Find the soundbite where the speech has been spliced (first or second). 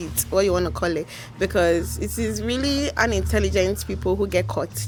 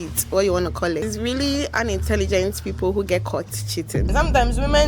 second